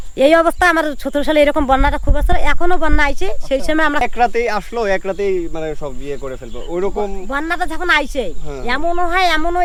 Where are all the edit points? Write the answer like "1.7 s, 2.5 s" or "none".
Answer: none